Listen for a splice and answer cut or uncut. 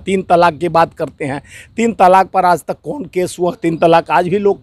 uncut